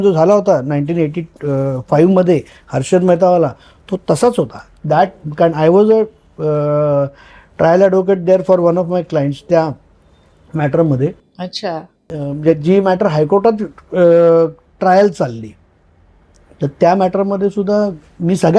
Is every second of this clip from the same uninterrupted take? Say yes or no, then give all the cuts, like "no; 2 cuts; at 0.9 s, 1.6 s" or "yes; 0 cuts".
yes; 0 cuts